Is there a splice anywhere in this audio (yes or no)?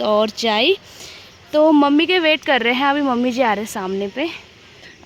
no